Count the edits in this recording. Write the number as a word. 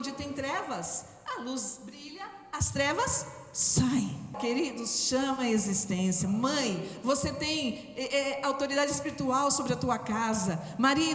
one